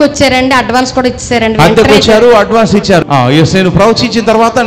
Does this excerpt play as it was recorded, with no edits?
no; 1 cut; at 3.0 s

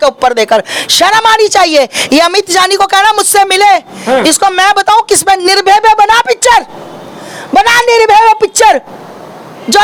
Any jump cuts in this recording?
no; 0 cuts

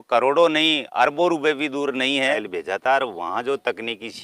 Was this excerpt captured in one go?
no; 1 cut; at 2.4 s

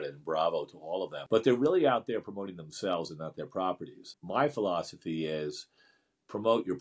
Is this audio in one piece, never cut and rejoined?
no; 2 cuts; at 1.2 s, 4.2 s

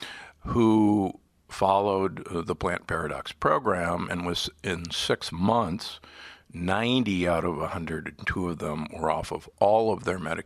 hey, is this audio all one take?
yes; 0 cuts

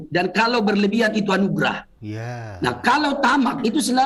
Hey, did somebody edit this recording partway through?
no; 0 cuts

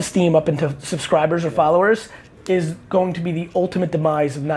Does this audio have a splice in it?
no; 0 cuts

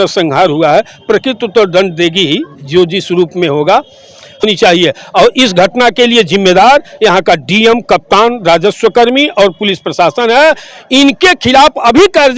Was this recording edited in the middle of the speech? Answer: yes; 1 cut; at 4.4 s

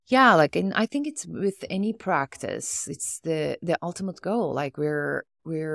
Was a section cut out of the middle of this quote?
no; 0 cuts

